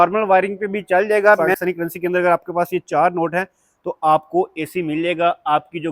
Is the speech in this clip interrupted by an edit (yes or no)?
yes